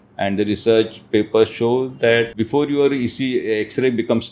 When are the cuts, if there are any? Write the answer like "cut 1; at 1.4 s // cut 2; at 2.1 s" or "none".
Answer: cut 1; at 2.3 s